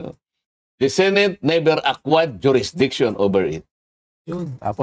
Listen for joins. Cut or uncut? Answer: uncut